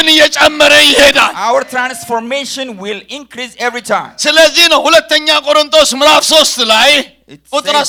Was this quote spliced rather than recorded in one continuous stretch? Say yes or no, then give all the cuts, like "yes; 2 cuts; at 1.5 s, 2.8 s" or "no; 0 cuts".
no; 0 cuts